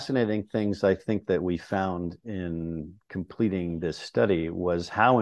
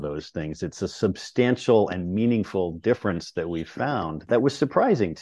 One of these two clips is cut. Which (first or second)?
second